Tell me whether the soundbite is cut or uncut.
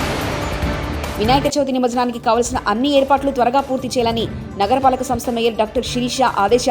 uncut